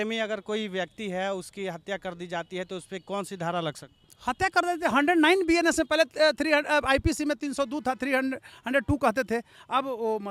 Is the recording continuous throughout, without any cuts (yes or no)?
yes